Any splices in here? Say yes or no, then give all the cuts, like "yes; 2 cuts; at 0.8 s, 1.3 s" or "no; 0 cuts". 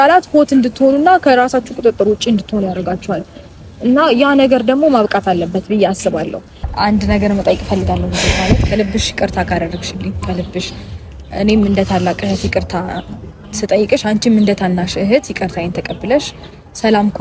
yes; 1 cut; at 6.6 s